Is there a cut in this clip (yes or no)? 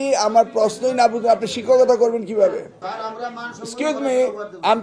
yes